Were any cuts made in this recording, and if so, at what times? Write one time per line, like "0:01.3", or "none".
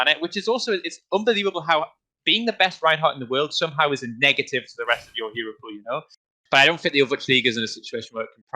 0:06.2

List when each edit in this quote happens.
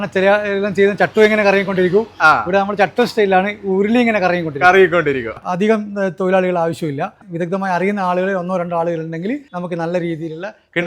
0:05.3
0:07.2
0:09.5

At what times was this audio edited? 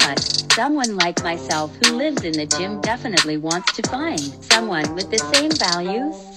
0:04.9

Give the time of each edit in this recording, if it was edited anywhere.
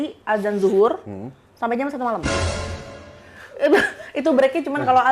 none

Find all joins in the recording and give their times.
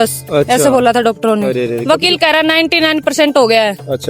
0:01.7

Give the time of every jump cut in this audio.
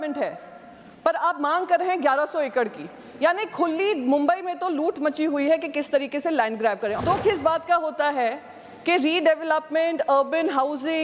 0:07.0

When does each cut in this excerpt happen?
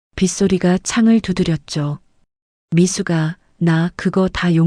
none

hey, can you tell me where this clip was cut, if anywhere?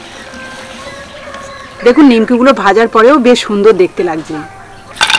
none

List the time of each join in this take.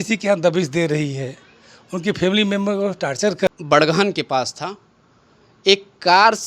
0:03.5

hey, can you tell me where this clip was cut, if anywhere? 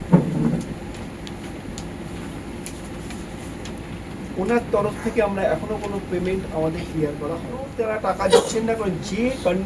0:07.8

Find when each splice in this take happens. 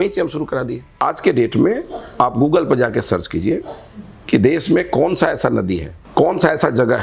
0:01.0
0:05.9

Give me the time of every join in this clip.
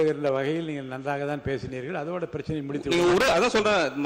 none

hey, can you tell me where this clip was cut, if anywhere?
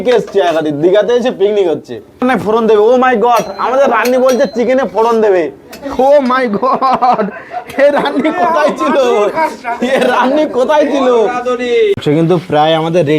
0:02.2
0:12.0

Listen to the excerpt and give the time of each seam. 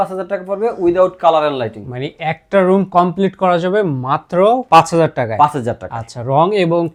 none

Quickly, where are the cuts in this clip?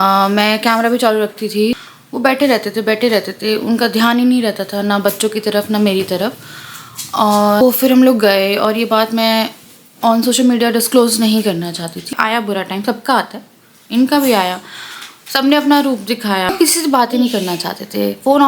0:01.8
0:07.6
0:12.1
0:16.5

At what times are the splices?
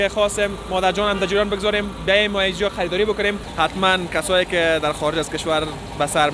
0:03.4

